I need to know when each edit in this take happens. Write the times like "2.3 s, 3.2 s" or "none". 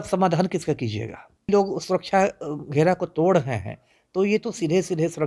1.5 s

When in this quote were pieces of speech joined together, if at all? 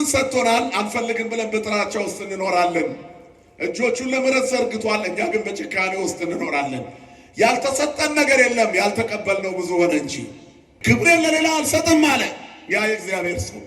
10.7 s

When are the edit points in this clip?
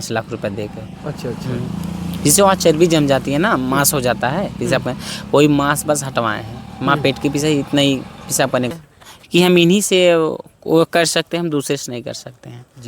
8.7 s

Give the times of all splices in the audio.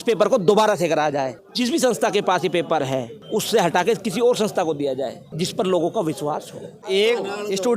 1.4 s, 3.2 s, 5.2 s, 6.9 s

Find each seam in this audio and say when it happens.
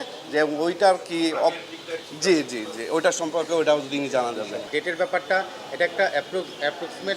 4.7 s

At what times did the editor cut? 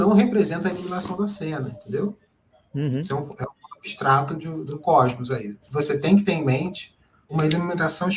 4.7 s, 5.6 s, 7.3 s

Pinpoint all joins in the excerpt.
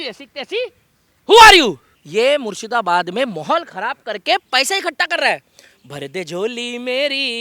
1.9 s

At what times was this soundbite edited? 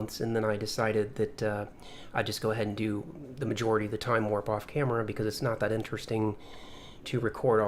3.2 s

